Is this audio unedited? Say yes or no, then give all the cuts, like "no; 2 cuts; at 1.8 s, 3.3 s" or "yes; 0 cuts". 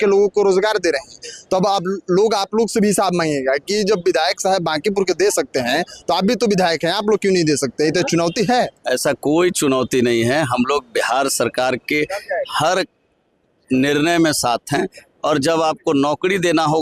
yes; 0 cuts